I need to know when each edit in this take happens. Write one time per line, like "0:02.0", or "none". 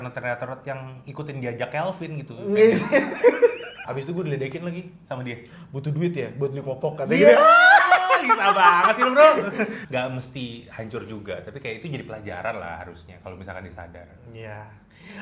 0:03.7
0:09.8